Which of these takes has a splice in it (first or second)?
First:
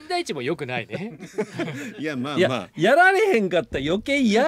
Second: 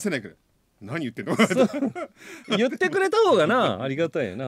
second